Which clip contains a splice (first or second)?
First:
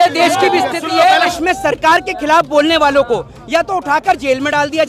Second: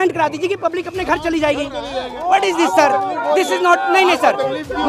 first